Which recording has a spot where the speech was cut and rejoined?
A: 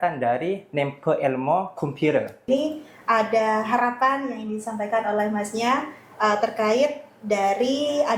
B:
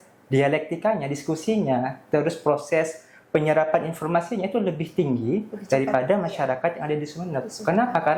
A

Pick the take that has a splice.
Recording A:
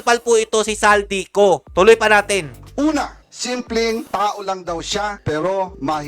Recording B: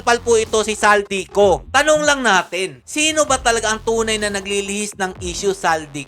B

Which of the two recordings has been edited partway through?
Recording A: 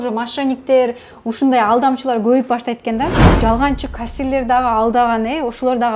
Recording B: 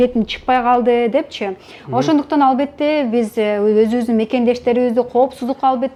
A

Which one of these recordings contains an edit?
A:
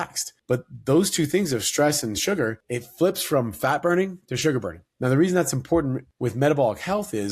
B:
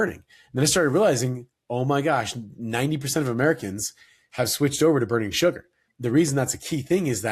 A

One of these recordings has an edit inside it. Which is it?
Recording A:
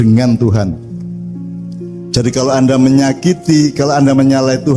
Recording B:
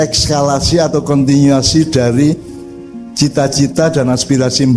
A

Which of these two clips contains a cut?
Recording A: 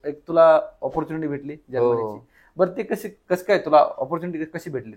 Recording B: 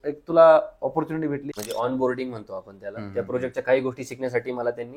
B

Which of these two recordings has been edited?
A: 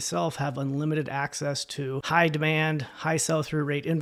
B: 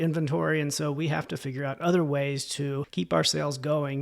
B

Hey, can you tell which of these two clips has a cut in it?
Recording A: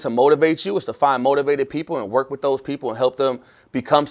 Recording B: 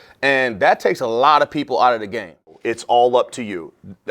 B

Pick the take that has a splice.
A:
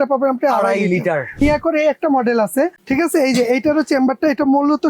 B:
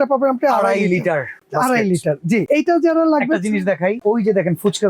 A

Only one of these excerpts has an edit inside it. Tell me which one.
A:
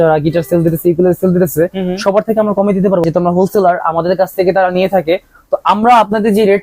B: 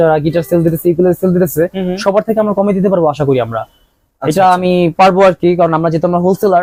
A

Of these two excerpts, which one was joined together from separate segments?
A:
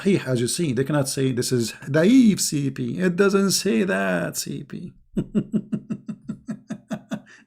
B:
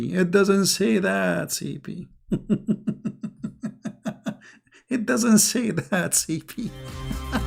A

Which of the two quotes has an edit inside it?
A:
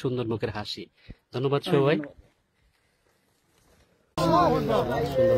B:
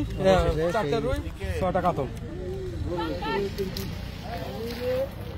A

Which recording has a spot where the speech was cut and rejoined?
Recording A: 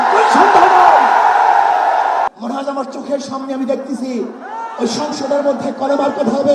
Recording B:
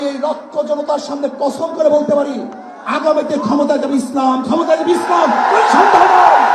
A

